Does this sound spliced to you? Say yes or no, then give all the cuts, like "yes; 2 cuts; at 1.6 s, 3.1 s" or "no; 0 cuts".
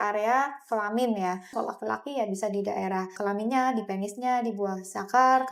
yes; 2 cuts; at 1.5 s, 3.1 s